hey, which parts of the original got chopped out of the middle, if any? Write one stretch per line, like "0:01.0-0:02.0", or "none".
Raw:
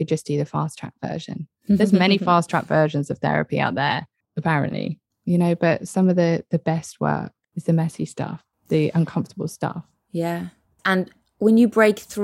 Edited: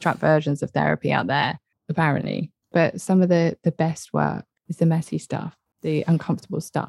0:05.2-0:05.6